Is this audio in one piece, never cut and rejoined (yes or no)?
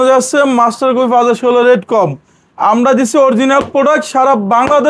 yes